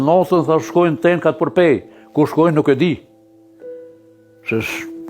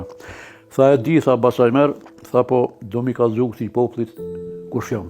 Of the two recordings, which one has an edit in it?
first; 2 cuts; at 3.0 s, 4.2 s

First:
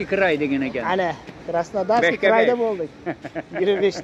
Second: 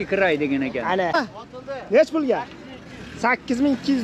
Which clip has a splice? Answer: second; 1 cut; at 1.1 s

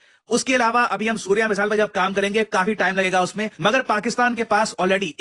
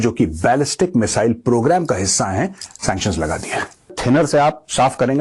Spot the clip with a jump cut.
second; 1 cut; at 4.0 s

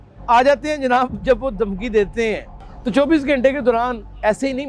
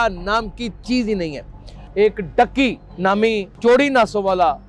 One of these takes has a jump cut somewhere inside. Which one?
second; 1 cut; at 1.8 s

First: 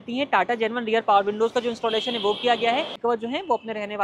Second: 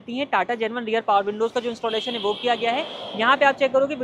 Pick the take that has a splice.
first; 1 cut; at 2.9 s

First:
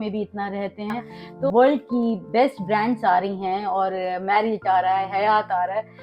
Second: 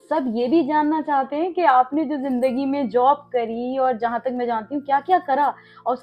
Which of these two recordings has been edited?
first; 1 cut; at 1.5 s

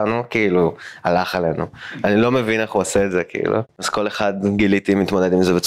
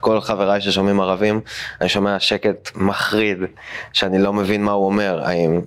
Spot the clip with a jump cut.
first; 1 cut; at 4.1 s

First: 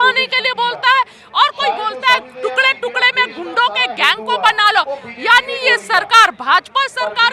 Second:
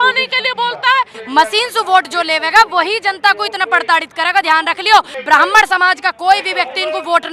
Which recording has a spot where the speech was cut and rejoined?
second; 2 cuts; at 1.2 s, 5.2 s

